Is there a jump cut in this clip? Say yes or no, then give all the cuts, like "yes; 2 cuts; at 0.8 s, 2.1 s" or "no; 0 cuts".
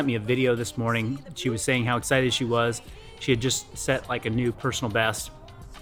no; 0 cuts